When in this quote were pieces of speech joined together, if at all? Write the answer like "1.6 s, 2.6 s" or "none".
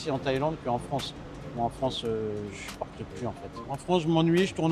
3.6 s